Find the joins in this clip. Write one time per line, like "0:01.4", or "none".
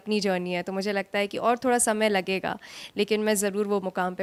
none